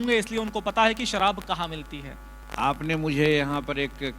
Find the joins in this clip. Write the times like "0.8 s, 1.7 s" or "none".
none